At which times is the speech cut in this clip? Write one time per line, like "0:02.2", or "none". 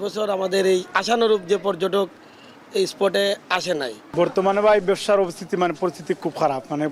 none